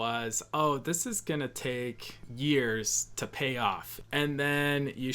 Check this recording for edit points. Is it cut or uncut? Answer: cut